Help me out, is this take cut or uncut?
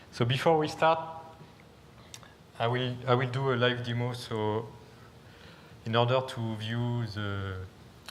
uncut